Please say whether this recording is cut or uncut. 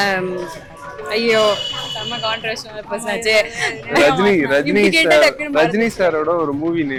uncut